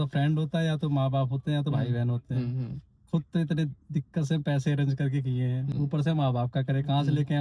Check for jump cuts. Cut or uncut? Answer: uncut